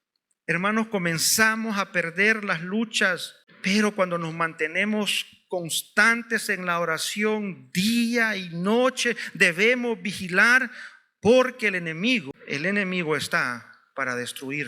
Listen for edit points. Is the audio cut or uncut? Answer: cut